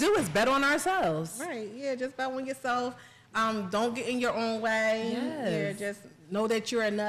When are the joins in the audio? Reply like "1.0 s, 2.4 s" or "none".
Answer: none